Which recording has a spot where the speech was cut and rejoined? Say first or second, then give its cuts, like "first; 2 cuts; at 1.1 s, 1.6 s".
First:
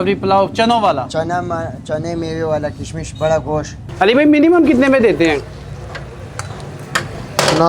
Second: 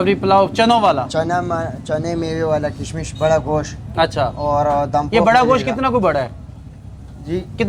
first; 1 cut; at 3.8 s